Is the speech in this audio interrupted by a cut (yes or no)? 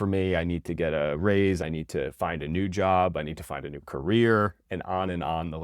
yes